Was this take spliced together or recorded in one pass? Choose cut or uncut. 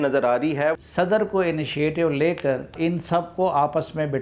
cut